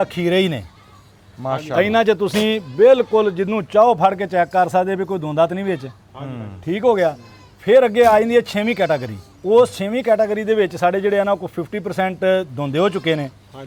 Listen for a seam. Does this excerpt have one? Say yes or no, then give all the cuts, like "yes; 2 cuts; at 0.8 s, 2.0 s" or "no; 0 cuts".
no; 0 cuts